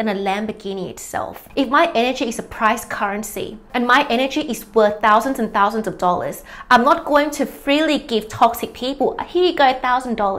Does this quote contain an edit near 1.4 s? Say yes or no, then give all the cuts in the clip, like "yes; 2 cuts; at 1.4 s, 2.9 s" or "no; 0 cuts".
yes; 1 cut; at 1.4 s